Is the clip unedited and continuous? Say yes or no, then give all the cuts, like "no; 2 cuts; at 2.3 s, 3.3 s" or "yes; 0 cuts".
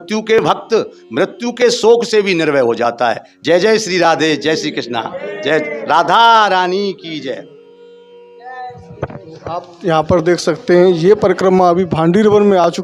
yes; 0 cuts